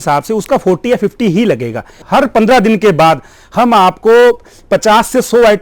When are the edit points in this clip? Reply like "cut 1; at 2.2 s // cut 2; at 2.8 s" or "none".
cut 1; at 2.0 s